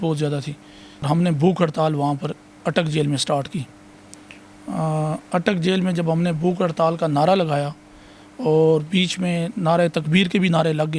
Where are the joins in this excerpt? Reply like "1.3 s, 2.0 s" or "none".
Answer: 1.1 s